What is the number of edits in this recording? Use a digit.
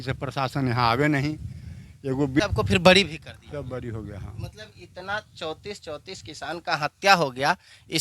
1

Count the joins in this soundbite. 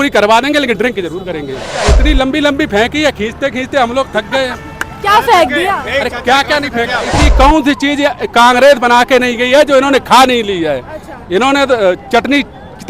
2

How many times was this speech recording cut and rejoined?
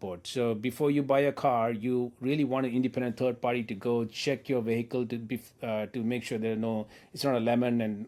0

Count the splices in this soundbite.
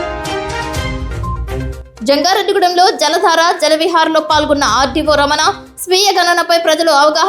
1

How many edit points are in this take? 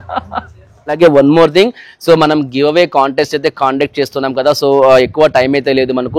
1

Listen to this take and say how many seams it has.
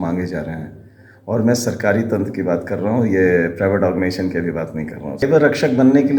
1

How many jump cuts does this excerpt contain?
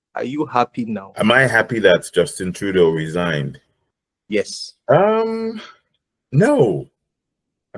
1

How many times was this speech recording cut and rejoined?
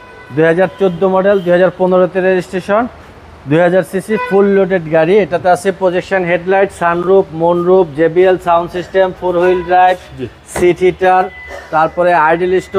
0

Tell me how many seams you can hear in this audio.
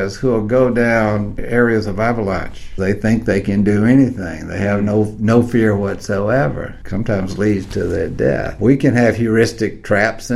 4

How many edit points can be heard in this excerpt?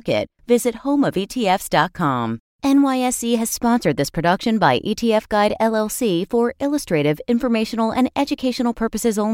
1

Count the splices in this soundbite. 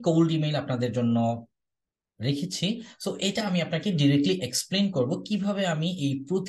0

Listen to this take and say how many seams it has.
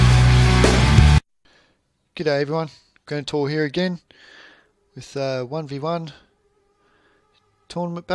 1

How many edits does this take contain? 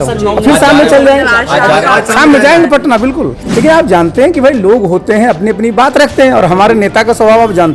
1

